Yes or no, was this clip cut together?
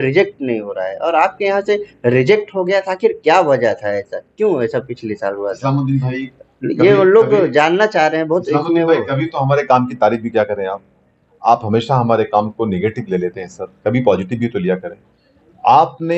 no